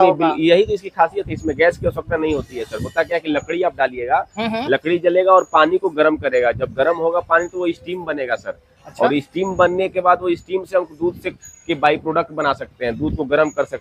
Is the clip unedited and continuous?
yes; 0 cuts

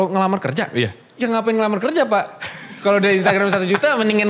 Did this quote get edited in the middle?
yes; 1 cut; at 1.0 s

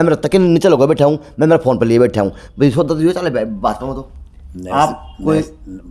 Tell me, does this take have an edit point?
no; 0 cuts

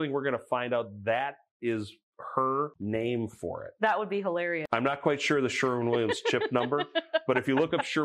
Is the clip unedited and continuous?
no; 2 cuts; at 2.8 s, 4.6 s

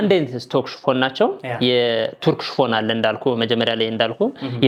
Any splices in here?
no; 0 cuts

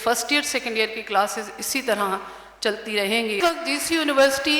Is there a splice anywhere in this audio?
yes; 1 cut; at 3.4 s

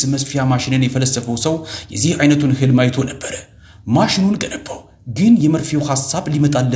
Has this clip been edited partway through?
no; 0 cuts

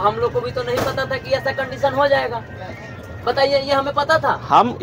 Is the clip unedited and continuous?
yes; 0 cuts

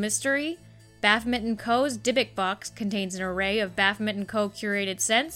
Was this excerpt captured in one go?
yes; 0 cuts

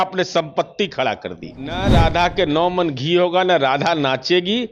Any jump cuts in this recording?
yes; 1 cut; at 1.8 s

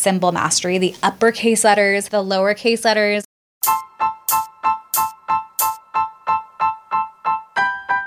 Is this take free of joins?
no; 2 cuts; at 2.0 s, 3.3 s

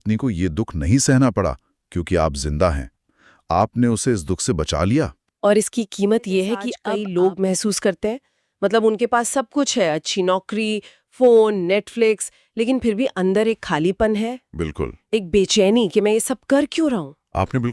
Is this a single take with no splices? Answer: no; 1 cut; at 6.7 s

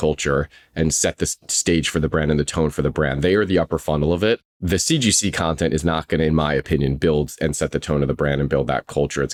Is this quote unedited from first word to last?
yes; 0 cuts

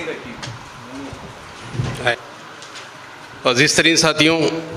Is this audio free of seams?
no; 1 cut; at 2.1 s

